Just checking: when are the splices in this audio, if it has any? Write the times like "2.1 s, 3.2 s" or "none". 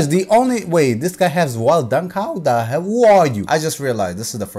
3.4 s